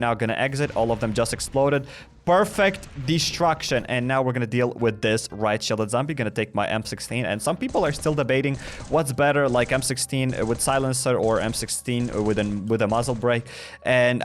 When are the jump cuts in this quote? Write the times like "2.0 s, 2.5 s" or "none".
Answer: none